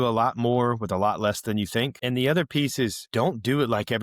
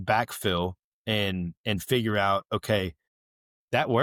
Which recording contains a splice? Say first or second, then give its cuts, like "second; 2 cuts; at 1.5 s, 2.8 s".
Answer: first; 2 cuts; at 2.0 s, 3.0 s